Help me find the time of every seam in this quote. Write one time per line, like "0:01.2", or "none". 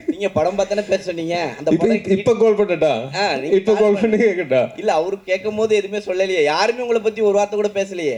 none